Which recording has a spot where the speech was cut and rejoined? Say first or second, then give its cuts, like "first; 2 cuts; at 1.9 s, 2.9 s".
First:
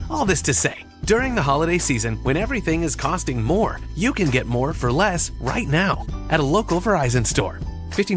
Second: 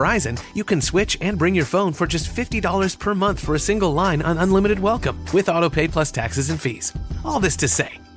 first; 1 cut; at 2.1 s